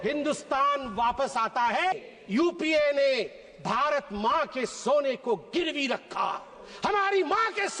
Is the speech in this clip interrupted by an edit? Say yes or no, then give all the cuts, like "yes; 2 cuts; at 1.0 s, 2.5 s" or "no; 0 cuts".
yes; 1 cut; at 1.9 s